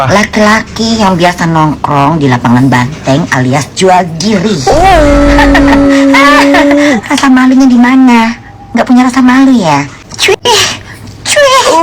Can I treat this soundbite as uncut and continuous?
no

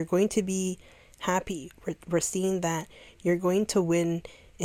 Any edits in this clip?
no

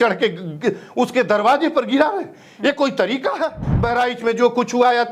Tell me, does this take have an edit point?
yes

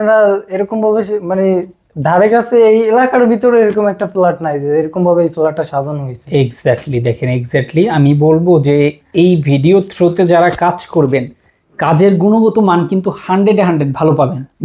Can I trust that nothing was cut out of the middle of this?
yes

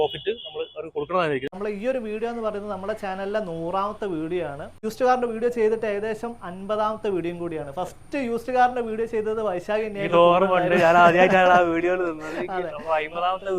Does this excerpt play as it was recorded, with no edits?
no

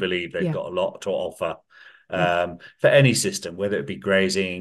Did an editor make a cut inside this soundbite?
no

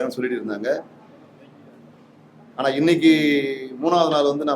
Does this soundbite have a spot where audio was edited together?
no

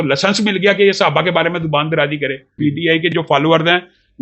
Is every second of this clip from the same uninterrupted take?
no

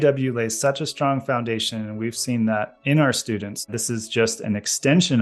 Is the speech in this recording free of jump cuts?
no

